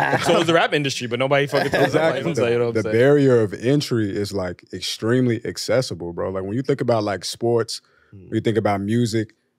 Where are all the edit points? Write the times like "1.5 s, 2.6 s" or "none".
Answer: 2.2 s